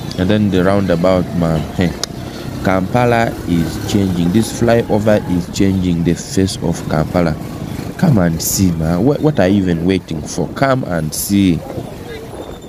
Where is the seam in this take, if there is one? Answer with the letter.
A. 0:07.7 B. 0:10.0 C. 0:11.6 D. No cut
C